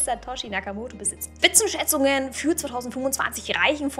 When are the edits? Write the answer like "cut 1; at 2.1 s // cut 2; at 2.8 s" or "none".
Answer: cut 1; at 1.2 s